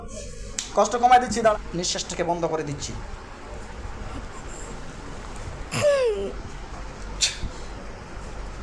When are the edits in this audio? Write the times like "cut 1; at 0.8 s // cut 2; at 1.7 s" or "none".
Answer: cut 1; at 1.5 s